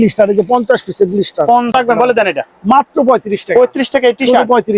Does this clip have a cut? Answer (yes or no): yes